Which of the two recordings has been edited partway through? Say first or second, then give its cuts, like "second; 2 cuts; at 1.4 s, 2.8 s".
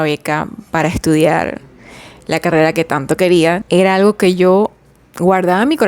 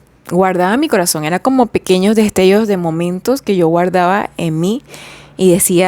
first; 1 cut; at 3.6 s